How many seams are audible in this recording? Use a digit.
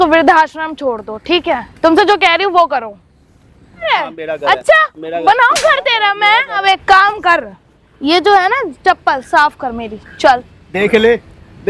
2